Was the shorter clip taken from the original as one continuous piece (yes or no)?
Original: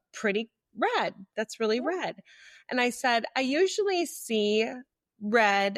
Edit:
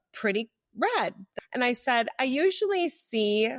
no